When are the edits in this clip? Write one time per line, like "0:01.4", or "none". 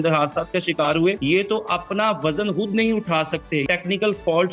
0:01.2
0:03.7